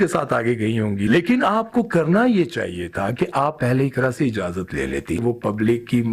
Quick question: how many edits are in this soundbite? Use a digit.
2